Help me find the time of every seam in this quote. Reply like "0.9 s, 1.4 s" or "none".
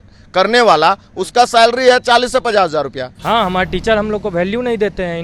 3.1 s